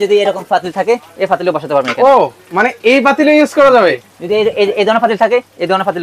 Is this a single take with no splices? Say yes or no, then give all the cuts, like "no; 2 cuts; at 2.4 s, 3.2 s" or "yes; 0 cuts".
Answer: yes; 0 cuts